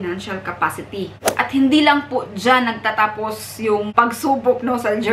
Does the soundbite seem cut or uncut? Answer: cut